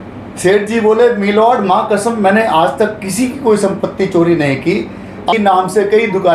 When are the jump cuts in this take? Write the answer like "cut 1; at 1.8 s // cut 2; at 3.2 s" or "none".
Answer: cut 1; at 5.3 s